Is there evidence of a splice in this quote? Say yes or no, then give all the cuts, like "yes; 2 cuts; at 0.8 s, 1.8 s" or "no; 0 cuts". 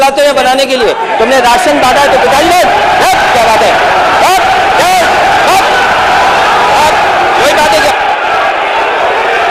no; 0 cuts